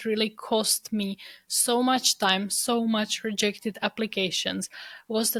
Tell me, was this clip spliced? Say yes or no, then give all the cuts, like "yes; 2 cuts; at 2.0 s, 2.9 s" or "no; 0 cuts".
no; 0 cuts